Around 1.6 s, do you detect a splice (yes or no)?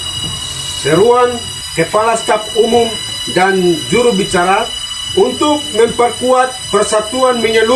yes